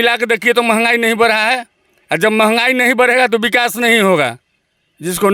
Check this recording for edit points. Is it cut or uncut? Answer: uncut